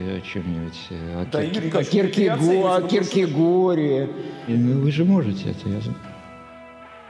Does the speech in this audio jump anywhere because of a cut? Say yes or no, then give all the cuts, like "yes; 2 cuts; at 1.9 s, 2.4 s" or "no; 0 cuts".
yes; 1 cut; at 4.5 s